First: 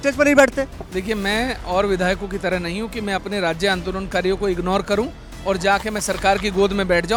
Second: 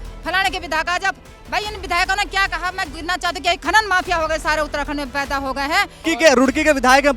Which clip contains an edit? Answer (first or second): second